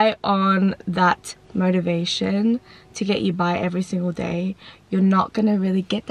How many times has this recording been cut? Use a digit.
0